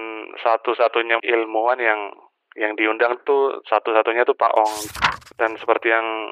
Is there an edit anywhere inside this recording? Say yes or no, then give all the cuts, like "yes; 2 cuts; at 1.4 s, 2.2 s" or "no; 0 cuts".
yes; 2 cuts; at 1.2 s, 4.8 s